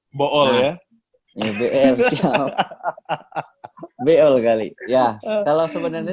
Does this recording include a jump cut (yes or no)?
no